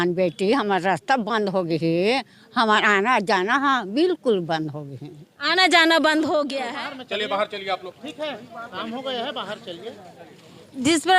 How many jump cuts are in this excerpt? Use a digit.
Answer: 1